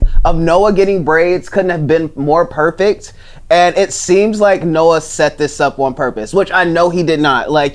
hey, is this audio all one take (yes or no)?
yes